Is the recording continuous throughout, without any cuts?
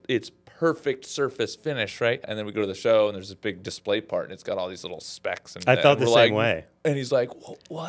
no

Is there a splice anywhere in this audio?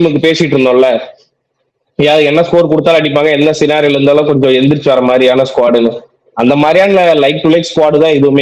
no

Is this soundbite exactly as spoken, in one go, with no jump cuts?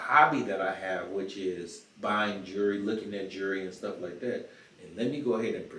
yes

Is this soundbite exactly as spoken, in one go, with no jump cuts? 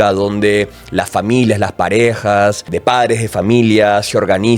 no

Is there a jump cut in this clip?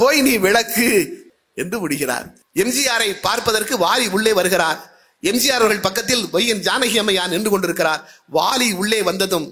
yes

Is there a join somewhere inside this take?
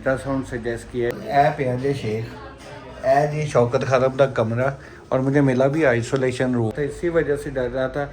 yes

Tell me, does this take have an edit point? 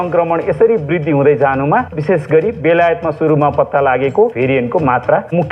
yes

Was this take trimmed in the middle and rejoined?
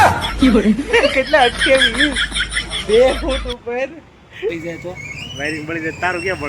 yes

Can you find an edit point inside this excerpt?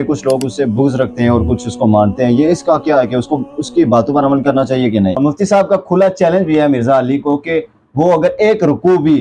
no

